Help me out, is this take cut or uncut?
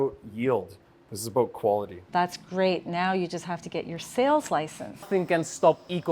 cut